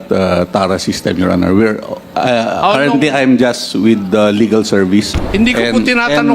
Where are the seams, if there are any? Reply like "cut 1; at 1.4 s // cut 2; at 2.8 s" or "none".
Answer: cut 1; at 5.2 s

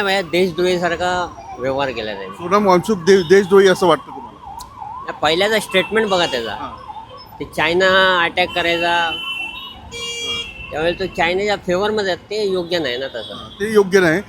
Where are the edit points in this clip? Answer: none

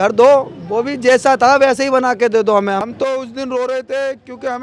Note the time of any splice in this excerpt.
cut 1; at 2.9 s

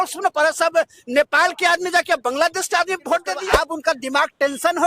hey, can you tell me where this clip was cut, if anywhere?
cut 1; at 3.4 s

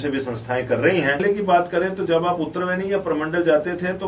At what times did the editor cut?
cut 1; at 1.2 s

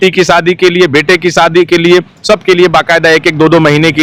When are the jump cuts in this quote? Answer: none

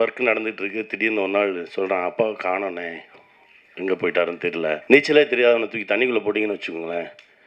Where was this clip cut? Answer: cut 1; at 4.8 s

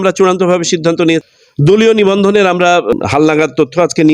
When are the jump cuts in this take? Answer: cut 1; at 1.2 s // cut 2; at 3.0 s

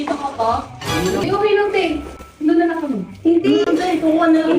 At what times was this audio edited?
cut 1; at 1.2 s

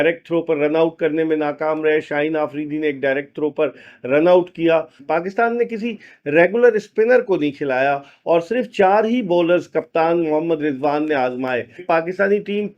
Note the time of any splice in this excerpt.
cut 1; at 5.0 s // cut 2; at 11.8 s

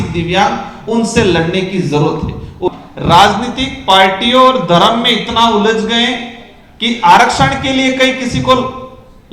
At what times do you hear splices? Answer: cut 1; at 2.7 s

